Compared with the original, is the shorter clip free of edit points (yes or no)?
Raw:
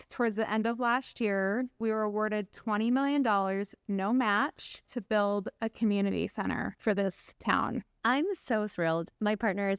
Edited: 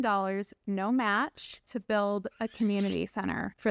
yes